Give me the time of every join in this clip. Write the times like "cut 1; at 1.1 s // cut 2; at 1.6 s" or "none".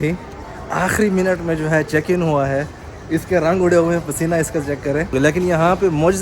cut 1; at 5.1 s